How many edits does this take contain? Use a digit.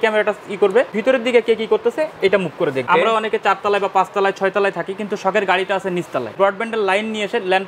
3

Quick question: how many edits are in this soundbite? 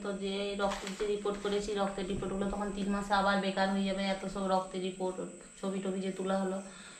0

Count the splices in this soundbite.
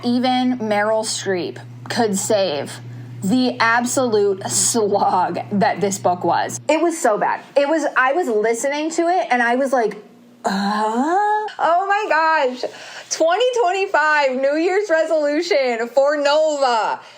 2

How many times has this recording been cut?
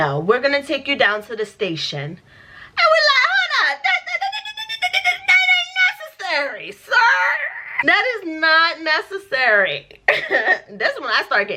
1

